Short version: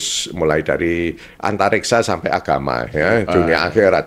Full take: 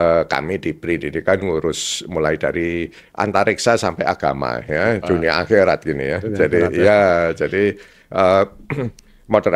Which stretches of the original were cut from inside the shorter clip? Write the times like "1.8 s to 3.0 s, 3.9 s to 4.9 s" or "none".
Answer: none

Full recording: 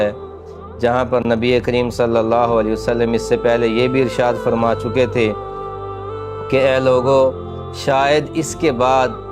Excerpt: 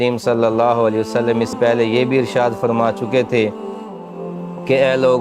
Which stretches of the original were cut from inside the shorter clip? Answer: 3.3 s to 3.4 s

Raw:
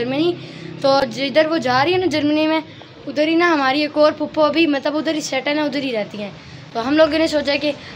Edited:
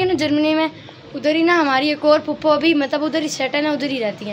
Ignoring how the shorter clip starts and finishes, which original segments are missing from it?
none

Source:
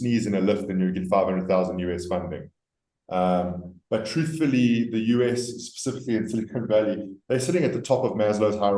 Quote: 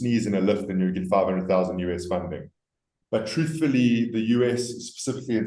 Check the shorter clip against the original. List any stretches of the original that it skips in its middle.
2.9 s to 3.7 s

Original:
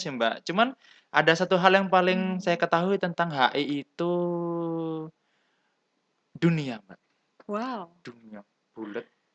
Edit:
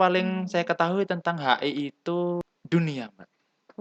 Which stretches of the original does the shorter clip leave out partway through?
4.3 s to 6.1 s

